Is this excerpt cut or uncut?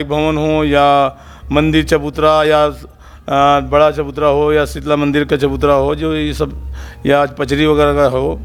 uncut